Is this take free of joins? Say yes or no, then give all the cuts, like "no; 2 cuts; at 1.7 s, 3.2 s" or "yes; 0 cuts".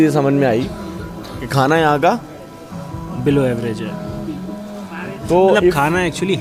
yes; 0 cuts